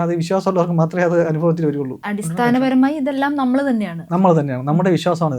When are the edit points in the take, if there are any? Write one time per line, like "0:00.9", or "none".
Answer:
0:01.9